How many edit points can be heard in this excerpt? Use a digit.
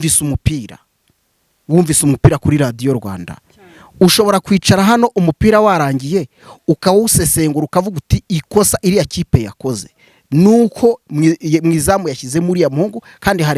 0